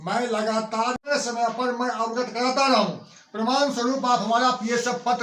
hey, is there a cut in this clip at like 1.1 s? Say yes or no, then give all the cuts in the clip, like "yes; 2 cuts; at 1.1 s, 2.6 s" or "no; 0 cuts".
yes; 1 cut; at 1.1 s